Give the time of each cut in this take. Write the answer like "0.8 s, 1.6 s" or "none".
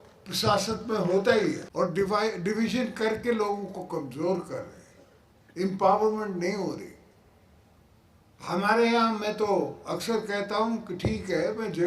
1.6 s